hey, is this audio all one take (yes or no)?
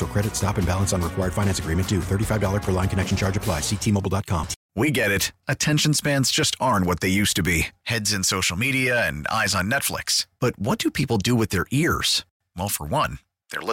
no